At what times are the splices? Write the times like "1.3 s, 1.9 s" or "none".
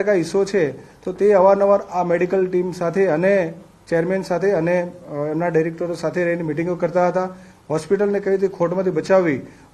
none